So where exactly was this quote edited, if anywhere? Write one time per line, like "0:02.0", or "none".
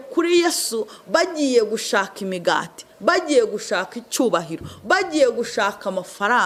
none